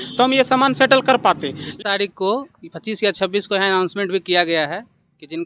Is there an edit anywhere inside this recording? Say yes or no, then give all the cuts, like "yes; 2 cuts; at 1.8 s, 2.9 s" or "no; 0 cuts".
yes; 1 cut; at 1.6 s